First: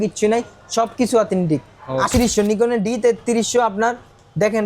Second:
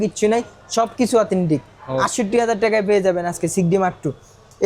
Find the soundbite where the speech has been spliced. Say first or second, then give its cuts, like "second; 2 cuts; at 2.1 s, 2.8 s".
first; 1 cut; at 2.1 s